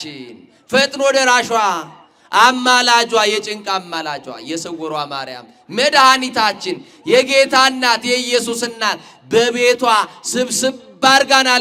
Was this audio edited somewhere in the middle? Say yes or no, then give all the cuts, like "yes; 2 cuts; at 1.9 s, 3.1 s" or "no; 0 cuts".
no; 0 cuts